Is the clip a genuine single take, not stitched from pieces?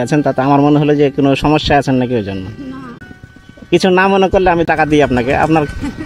no; 2 cuts; at 3.0 s, 4.6 s

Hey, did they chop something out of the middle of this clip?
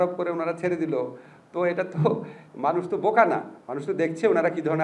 no; 0 cuts

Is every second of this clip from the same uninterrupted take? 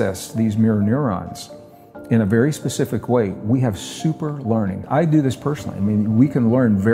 no; 1 cut; at 4.8 s

